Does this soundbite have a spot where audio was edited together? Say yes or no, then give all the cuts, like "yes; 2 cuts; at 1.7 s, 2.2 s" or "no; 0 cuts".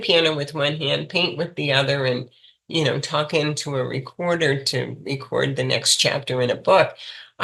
no; 0 cuts